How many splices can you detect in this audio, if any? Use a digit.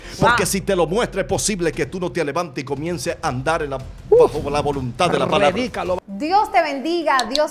1